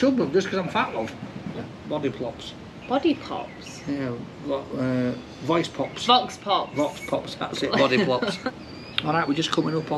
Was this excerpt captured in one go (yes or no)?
no